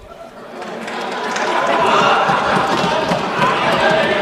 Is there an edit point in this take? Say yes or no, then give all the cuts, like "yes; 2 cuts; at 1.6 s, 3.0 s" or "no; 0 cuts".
no; 0 cuts